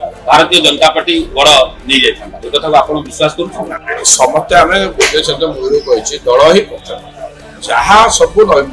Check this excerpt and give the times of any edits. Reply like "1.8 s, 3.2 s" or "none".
none

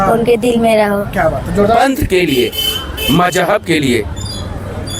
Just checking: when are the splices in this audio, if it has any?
1.8 s

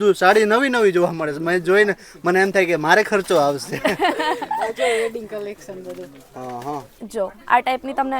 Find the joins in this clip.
6.9 s

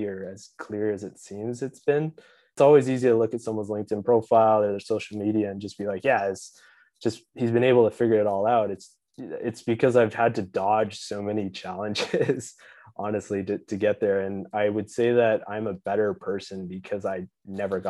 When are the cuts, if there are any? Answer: 2.6 s

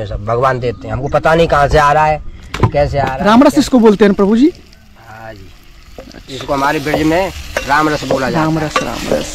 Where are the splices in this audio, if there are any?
3.2 s

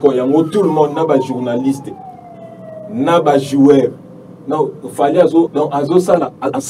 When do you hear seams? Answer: 5.5 s

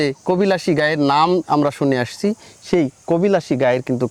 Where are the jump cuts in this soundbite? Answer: none

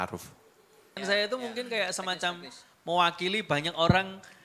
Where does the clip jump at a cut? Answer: 0.9 s

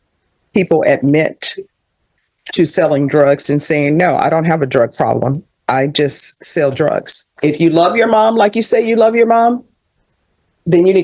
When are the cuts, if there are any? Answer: 7.3 s

